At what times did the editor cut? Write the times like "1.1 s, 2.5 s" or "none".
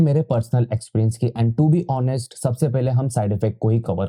none